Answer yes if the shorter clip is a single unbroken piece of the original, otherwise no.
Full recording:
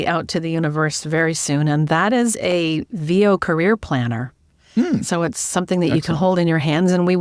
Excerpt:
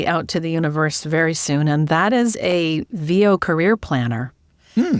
yes